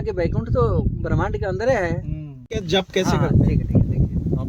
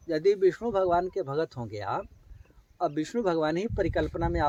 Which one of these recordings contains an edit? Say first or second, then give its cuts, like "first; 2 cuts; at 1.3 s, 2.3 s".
first; 1 cut; at 2.5 s